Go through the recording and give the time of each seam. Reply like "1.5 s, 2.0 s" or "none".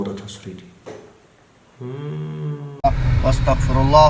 2.7 s